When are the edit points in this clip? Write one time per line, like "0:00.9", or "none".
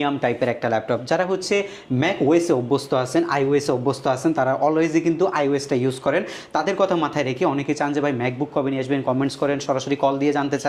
none